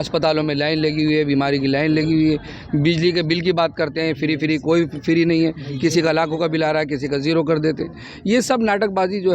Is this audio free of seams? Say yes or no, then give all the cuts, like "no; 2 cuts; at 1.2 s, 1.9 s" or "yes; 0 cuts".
yes; 0 cuts